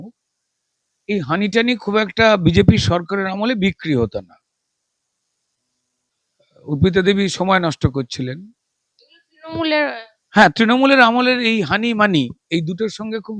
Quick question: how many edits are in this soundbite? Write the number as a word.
zero